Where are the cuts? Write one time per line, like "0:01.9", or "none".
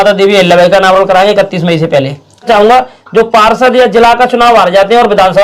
0:02.5